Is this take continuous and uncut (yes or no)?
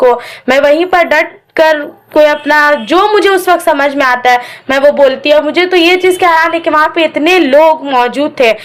yes